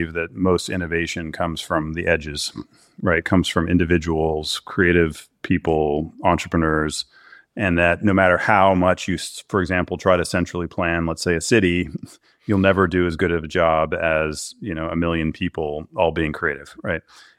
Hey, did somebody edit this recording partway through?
no; 0 cuts

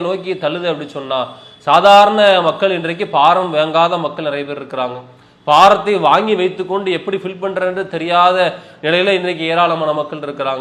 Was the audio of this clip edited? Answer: no; 0 cuts

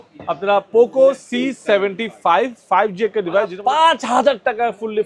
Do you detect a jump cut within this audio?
yes; 1 cut; at 3.5 s

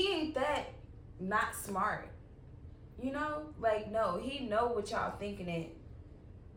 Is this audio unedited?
yes; 0 cuts

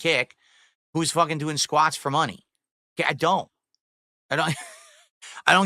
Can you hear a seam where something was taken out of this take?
no; 0 cuts

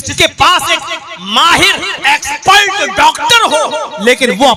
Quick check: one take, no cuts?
yes; 0 cuts

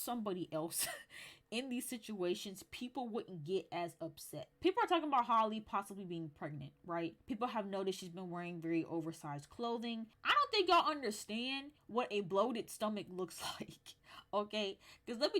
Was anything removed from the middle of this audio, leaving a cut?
yes; 3 cuts; at 4.5 s, 7.2 s, 10.2 s

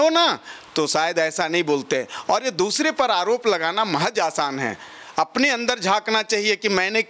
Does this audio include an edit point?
no; 0 cuts

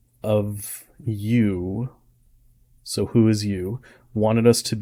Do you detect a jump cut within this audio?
no; 0 cuts

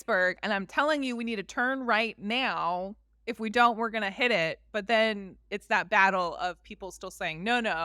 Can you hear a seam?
no; 0 cuts

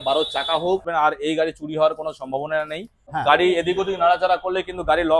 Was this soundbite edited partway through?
yes; 2 cuts; at 0.9 s, 3.0 s

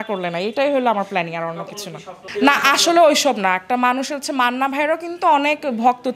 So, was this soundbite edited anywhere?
no; 0 cuts

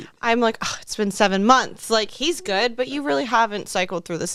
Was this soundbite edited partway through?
no; 0 cuts

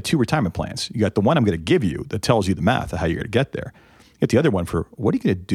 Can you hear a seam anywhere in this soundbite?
no; 0 cuts

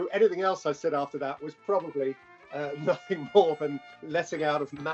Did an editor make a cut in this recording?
yes; 1 cut; at 3.9 s

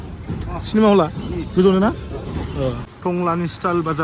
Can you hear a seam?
yes; 1 cut; at 2.9 s

